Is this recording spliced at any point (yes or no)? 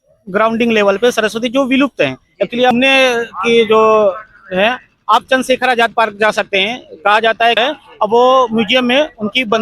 yes